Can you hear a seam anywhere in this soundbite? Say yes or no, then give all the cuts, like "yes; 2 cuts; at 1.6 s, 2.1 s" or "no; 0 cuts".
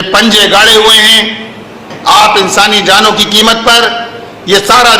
yes; 1 cut; at 1.9 s